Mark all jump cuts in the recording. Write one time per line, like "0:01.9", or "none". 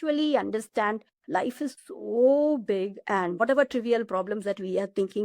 0:01.5
0:03.4